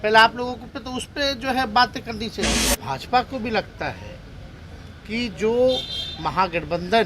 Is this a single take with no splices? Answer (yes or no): no